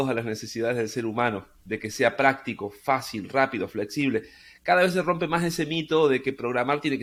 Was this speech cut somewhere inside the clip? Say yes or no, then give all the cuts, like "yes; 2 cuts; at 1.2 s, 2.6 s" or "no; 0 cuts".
no; 0 cuts